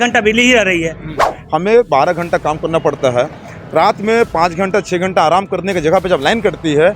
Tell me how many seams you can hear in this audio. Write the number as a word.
one